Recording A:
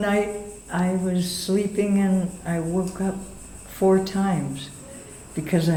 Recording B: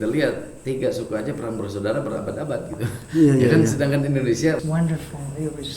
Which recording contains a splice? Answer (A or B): B